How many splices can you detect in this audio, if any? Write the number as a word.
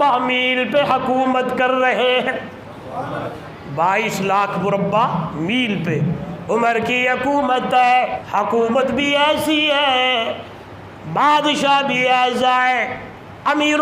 two